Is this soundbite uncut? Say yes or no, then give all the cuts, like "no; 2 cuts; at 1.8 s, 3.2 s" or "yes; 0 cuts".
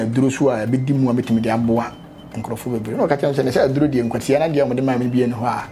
yes; 0 cuts